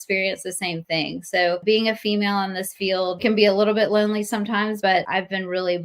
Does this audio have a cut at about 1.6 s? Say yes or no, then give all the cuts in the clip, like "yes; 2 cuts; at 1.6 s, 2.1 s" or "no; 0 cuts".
yes; 3 cuts; at 1.6 s, 3.2 s, 4.8 s